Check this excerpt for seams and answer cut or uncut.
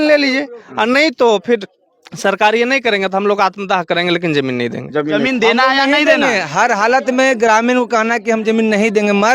cut